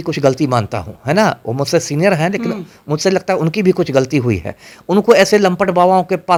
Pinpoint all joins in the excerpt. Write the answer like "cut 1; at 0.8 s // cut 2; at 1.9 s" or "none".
none